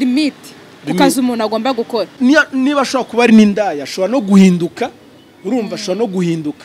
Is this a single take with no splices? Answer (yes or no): no